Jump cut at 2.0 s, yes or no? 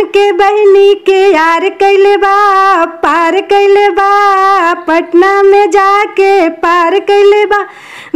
no